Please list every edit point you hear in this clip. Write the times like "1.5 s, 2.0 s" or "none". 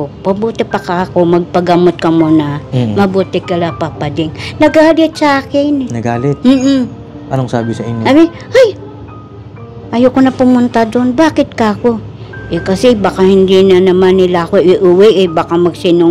none